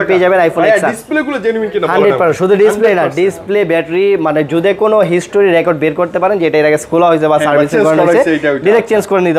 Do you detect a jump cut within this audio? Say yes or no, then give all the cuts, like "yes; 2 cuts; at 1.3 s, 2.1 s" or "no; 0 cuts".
no; 0 cuts